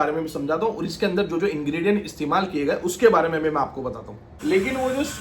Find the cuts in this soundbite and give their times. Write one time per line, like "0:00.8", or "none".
0:04.3